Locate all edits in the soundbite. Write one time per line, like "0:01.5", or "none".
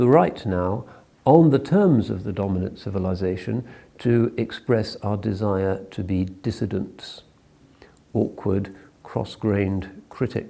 0:07.7